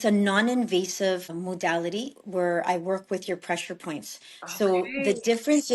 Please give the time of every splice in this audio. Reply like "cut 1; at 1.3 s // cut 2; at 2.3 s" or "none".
cut 1; at 1.3 s